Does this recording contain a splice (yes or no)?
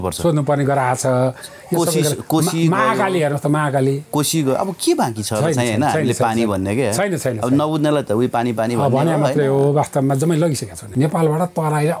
yes